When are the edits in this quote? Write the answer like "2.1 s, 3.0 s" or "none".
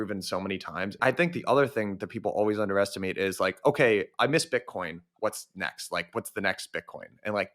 1.0 s